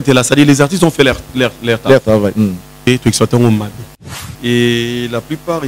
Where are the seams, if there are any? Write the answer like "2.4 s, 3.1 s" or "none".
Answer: 2.8 s, 4.0 s